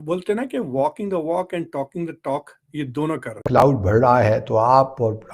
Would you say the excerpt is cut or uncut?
cut